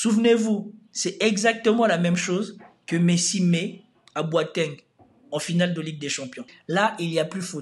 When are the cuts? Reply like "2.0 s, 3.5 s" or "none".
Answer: 6.5 s